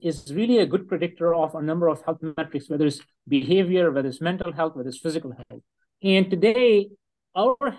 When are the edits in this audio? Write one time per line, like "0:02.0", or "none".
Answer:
none